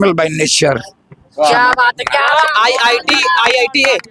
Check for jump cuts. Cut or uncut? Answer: uncut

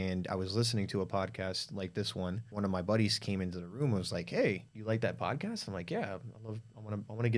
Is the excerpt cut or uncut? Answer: cut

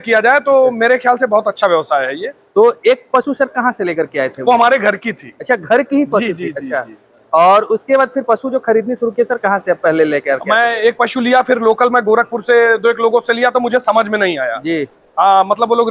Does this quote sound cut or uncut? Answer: uncut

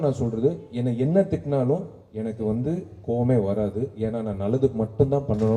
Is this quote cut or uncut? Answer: uncut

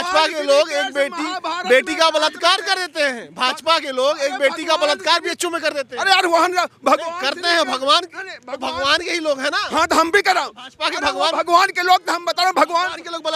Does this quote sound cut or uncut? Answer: uncut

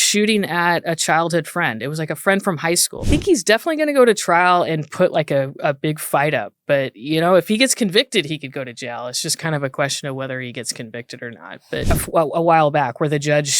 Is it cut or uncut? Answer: cut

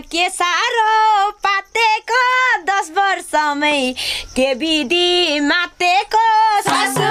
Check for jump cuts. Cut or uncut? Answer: uncut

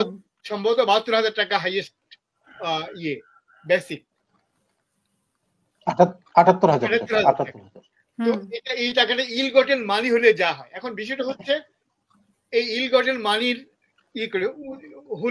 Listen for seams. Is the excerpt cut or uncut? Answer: uncut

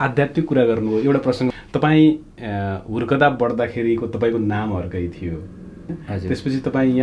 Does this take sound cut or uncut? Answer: cut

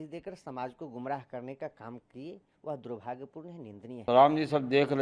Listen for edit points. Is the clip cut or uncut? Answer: cut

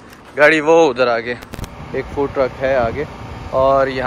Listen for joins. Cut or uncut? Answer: cut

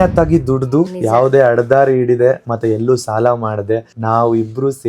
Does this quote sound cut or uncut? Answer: cut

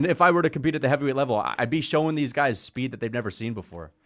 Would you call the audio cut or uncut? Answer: uncut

